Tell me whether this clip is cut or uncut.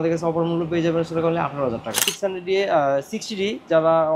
cut